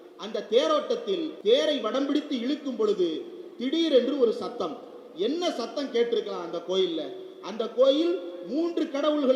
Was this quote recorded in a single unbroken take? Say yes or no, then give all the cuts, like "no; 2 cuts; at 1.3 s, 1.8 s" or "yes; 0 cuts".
no; 1 cut; at 1.3 s